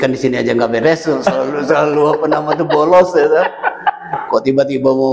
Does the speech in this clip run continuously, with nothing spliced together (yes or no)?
yes